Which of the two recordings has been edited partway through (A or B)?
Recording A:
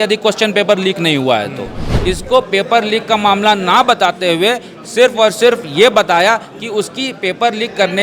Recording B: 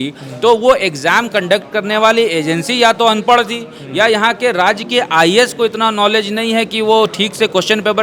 A